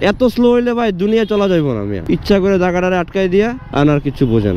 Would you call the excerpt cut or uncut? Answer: cut